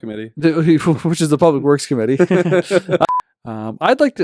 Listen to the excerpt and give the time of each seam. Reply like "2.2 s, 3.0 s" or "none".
3.1 s